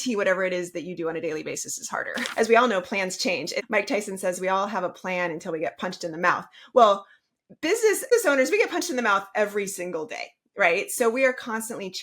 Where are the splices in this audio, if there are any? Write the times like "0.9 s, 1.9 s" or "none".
2.2 s, 3.6 s, 8.1 s